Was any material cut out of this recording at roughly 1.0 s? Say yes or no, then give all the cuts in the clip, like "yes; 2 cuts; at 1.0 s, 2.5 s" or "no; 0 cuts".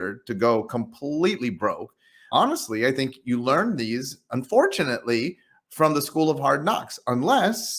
no; 1 cut; at 2.2 s